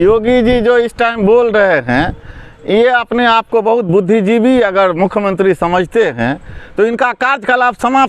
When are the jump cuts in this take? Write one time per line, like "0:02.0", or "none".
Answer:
none